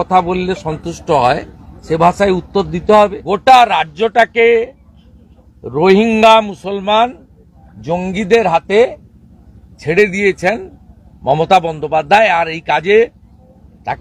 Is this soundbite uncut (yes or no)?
no